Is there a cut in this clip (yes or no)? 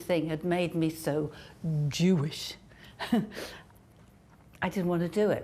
no